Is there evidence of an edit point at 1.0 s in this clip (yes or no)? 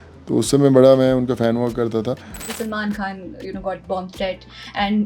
no